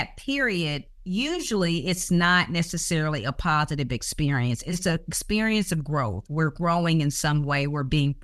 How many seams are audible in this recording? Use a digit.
0